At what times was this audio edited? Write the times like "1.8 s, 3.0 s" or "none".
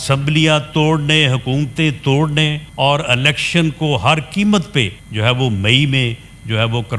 2.6 s, 5.0 s